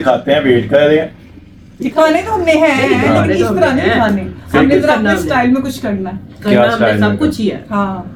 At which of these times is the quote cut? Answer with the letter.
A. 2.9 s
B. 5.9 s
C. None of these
C